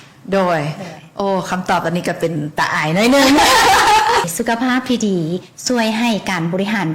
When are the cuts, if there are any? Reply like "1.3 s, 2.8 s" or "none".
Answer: 4.3 s